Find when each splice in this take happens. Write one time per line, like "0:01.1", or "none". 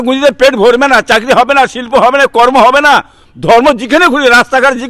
none